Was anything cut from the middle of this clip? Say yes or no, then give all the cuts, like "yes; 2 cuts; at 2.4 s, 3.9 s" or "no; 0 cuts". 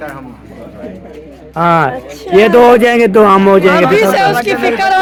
no; 0 cuts